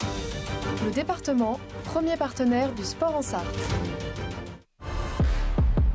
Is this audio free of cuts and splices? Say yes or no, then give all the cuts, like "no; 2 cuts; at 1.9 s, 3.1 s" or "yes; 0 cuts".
no; 1 cut; at 5.0 s